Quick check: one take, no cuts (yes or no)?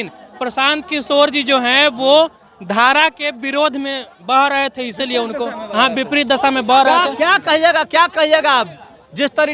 yes